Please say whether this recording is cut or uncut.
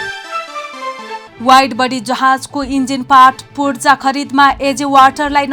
cut